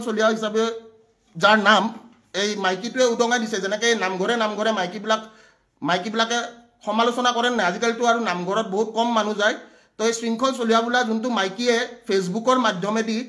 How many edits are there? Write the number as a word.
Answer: zero